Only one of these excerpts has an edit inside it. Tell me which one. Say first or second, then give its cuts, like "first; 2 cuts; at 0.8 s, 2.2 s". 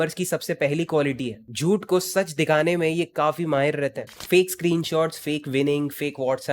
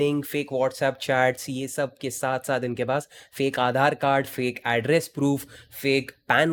first; 1 cut; at 4.1 s